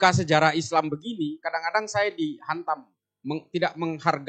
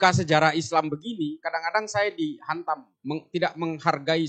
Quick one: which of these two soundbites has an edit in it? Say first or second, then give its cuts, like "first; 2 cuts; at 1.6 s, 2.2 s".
second; 1 cut; at 2.9 s